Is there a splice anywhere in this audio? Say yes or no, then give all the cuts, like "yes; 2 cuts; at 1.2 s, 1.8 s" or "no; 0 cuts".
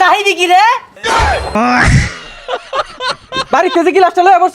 yes; 2 cuts; at 1.3 s, 3.3 s